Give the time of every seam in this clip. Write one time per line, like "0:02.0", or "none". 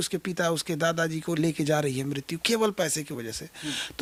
none